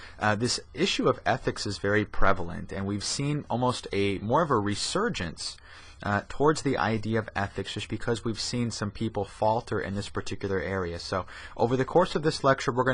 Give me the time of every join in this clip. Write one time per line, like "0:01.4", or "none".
0:04.9